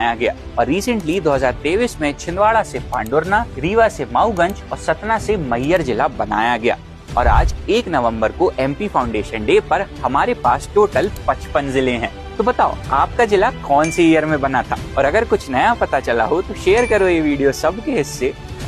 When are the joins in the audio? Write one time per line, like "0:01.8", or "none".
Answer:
none